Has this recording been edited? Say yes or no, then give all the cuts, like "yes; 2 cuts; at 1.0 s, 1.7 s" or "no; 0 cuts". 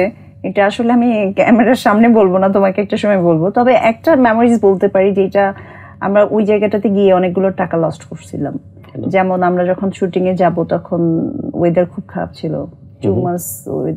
no; 0 cuts